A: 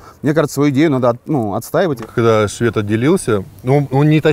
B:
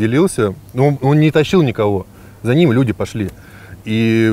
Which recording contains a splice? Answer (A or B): A